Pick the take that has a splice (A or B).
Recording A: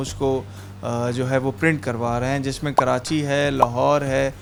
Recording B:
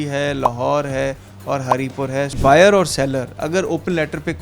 B